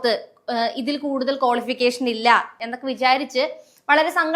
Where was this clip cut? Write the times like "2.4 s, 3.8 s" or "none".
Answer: 2.6 s